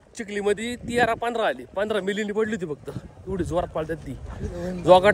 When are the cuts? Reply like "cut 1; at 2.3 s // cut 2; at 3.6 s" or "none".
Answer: none